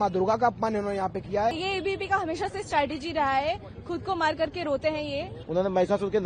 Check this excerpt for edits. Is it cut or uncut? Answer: cut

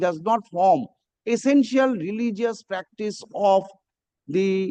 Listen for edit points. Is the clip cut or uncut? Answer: uncut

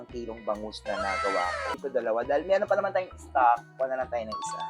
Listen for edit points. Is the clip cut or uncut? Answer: cut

